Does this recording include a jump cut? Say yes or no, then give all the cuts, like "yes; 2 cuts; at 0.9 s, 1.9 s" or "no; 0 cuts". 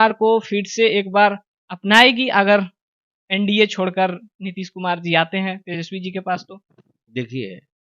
no; 0 cuts